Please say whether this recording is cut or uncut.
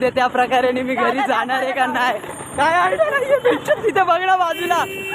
uncut